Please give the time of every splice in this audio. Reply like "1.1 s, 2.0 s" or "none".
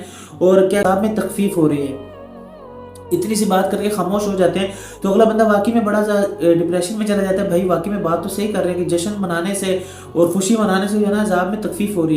1.0 s